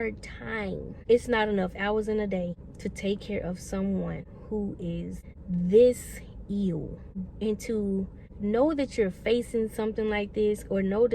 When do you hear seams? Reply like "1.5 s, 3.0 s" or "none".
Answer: 0.9 s, 4.3 s, 5.3 s, 7.2 s